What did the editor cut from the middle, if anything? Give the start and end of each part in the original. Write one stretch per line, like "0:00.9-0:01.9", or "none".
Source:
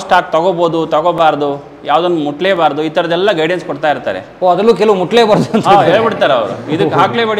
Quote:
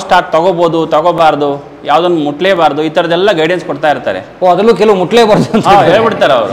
none